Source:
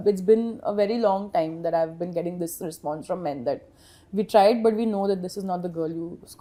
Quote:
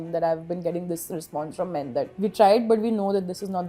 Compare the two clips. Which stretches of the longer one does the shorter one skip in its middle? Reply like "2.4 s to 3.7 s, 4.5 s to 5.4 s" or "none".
3.6 s to 4.1 s